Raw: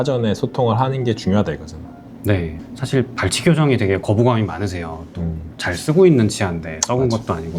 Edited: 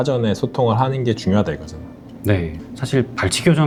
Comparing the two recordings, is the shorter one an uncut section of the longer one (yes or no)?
yes